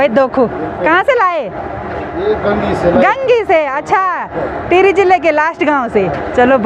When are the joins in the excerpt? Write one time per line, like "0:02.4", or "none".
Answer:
none